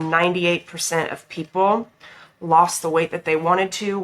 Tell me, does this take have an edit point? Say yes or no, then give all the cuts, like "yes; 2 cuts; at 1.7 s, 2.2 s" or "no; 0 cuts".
no; 0 cuts